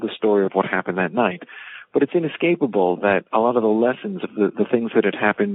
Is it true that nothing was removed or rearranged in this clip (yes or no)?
yes